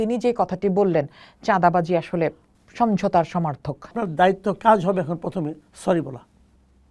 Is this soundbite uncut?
no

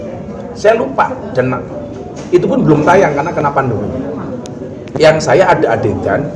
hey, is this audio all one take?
yes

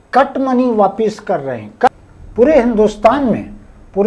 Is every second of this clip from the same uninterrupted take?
no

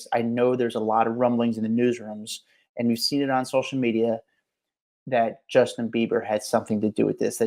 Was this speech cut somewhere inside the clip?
no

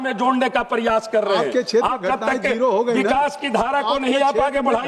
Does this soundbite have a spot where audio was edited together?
no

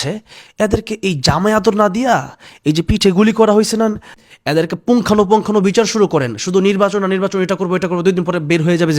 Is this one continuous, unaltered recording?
no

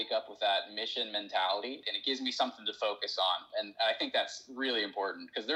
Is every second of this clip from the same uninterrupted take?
no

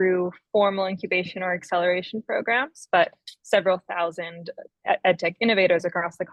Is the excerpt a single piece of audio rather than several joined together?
yes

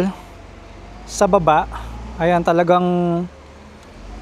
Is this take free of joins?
yes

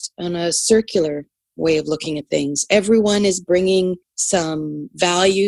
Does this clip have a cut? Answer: yes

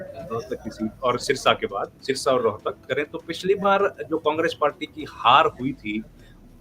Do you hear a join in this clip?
yes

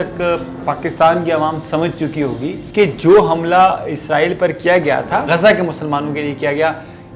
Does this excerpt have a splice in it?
yes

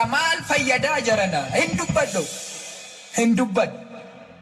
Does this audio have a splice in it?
no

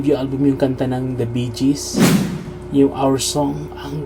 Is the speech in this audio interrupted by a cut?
no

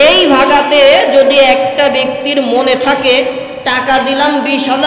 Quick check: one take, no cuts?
yes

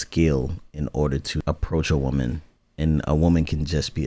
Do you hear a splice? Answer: yes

